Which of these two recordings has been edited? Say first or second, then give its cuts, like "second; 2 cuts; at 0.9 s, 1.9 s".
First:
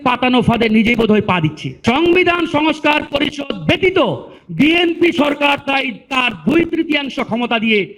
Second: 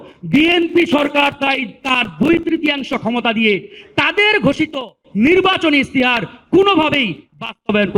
first; 1 cut; at 1.7 s